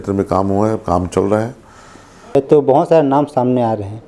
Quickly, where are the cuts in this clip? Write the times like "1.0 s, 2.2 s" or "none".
2.3 s